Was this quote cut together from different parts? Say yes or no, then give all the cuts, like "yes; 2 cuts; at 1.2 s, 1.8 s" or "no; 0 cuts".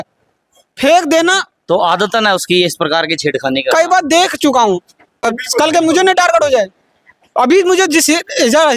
yes; 1 cut; at 5.3 s